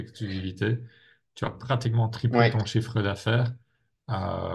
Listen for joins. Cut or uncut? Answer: uncut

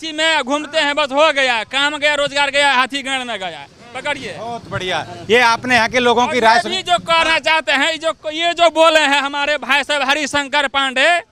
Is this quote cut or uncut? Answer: uncut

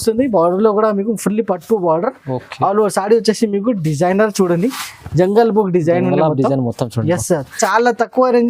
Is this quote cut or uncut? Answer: cut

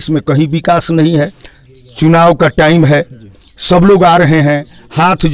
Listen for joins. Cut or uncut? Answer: cut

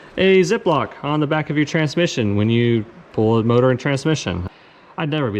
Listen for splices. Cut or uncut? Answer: cut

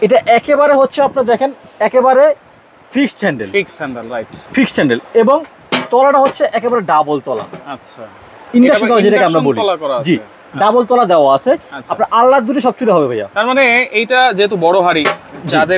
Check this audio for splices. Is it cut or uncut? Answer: uncut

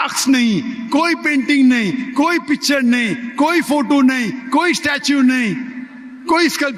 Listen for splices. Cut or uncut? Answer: uncut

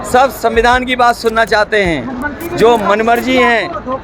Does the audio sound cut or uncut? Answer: uncut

